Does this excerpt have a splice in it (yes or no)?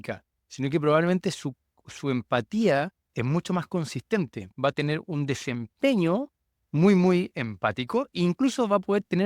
yes